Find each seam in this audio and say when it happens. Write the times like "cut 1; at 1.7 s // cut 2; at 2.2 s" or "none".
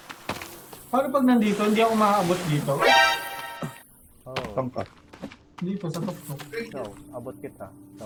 none